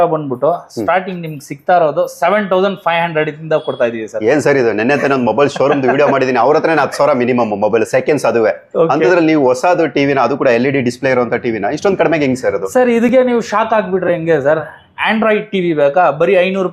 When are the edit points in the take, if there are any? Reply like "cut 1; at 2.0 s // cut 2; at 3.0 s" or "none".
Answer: none